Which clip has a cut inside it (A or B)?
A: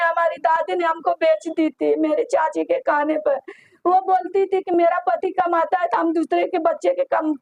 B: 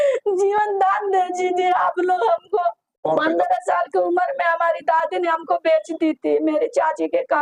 B